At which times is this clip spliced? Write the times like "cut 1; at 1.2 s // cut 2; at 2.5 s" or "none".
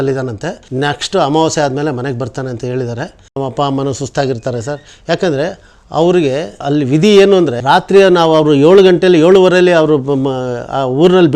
cut 1; at 3.2 s